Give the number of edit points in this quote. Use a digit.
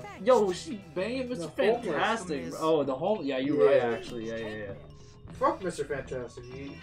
0